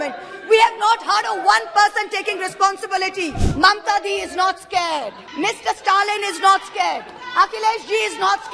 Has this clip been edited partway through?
yes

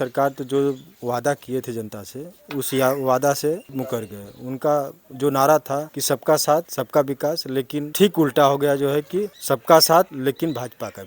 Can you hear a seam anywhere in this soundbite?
yes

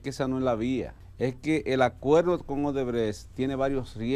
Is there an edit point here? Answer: yes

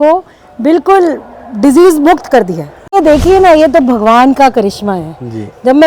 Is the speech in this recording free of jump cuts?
no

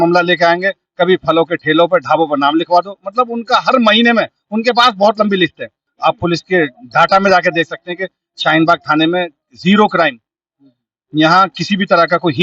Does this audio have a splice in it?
yes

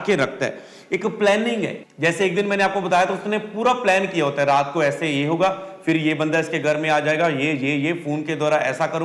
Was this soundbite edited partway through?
yes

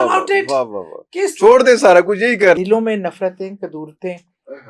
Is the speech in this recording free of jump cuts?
no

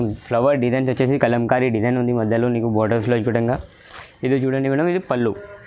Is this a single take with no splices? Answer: yes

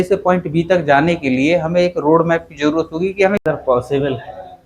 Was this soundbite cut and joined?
yes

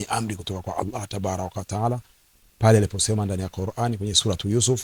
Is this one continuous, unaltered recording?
yes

